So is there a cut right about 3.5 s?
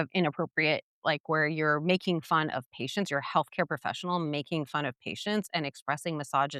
no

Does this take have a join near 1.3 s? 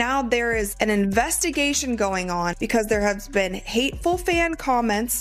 no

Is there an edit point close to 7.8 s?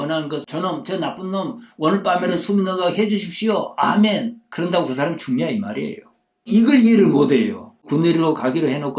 yes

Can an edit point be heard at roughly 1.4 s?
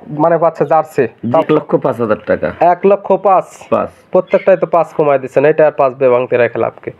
yes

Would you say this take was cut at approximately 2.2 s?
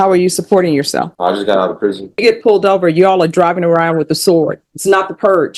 yes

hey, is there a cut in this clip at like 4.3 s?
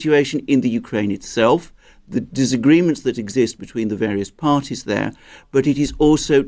yes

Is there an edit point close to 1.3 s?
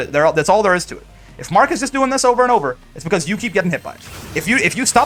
no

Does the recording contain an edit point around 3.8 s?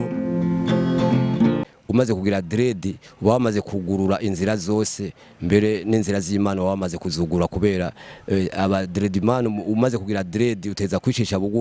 no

